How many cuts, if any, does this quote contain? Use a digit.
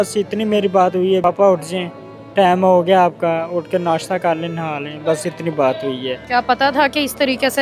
2